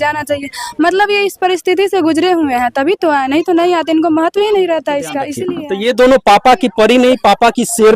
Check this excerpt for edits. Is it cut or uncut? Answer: cut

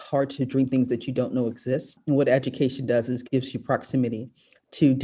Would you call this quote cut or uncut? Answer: cut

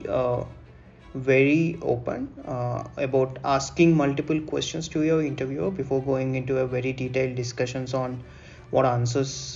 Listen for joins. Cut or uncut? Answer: uncut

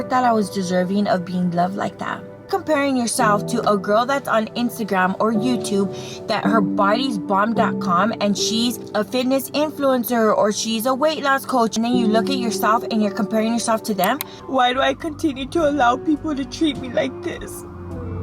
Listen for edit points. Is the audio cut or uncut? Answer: cut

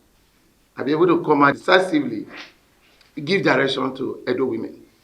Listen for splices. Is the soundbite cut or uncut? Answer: cut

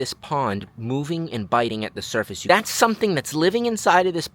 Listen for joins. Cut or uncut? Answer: cut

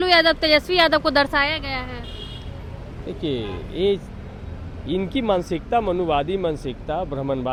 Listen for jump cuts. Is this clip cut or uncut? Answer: uncut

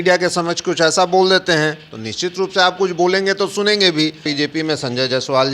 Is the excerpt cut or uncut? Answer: cut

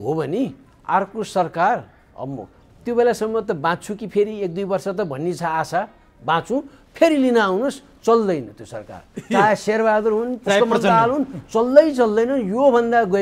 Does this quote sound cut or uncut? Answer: uncut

